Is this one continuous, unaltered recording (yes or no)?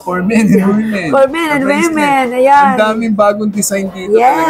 yes